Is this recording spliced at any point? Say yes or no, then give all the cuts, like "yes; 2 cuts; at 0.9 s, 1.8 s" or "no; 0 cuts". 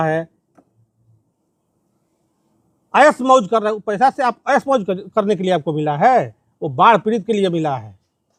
no; 0 cuts